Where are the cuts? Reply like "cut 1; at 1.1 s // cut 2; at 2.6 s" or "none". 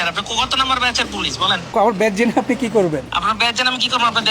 cut 1; at 1.7 s // cut 2; at 3.1 s